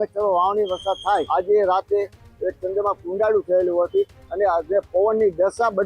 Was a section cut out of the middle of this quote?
yes; 1 cut; at 1.3 s

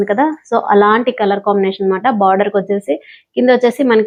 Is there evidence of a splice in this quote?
no; 0 cuts

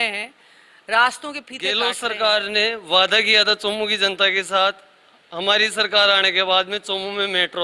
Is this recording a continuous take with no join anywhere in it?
no; 1 cut; at 1.5 s

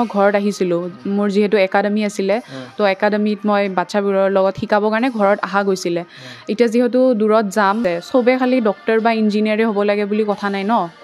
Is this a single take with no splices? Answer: no; 1 cut; at 7.8 s

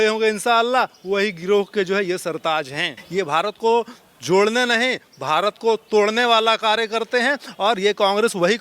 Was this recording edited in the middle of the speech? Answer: yes; 1 cut; at 3.0 s

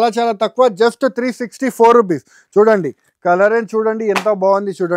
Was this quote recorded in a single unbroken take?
yes; 0 cuts

